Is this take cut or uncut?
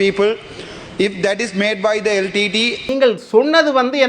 cut